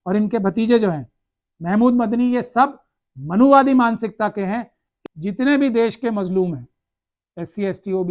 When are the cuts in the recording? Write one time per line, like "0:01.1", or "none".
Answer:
0:04.8